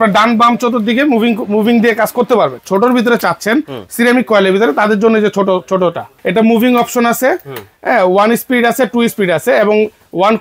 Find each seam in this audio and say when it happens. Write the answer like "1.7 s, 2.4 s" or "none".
2.6 s, 6.1 s